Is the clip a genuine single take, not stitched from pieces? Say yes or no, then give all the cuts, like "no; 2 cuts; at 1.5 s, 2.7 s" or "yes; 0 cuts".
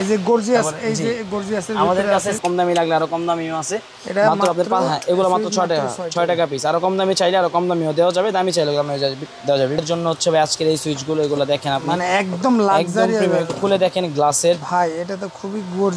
no; 2 cuts; at 2.4 s, 9.8 s